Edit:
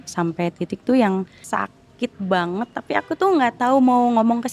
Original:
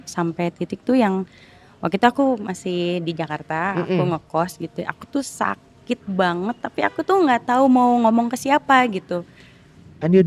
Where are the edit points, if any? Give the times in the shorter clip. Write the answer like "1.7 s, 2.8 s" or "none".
1.4 s